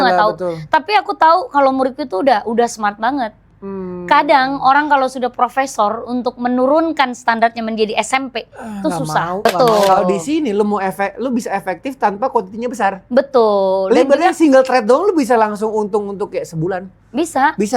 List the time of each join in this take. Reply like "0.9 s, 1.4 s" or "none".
9.4 s